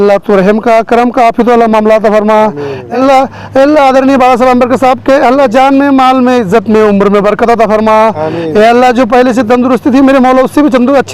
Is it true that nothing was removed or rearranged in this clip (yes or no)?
no